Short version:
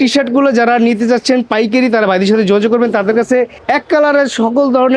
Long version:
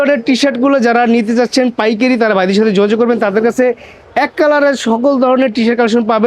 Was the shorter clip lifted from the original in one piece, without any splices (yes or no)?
no